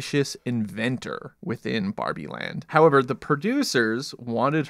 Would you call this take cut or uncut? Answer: cut